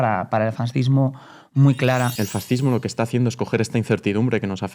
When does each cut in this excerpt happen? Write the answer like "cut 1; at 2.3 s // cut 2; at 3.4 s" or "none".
cut 1; at 2.1 s